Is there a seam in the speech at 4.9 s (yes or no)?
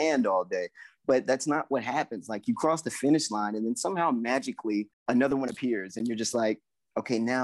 yes